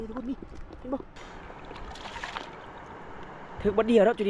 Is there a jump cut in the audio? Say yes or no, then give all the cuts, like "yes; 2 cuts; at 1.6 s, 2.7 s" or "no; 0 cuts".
yes; 1 cut; at 1.3 s